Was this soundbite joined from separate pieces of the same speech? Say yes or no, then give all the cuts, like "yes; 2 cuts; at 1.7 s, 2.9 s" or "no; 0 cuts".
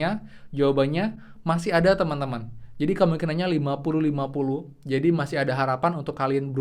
no; 0 cuts